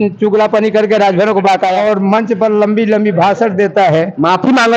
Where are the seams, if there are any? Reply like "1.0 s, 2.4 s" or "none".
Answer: 1.8 s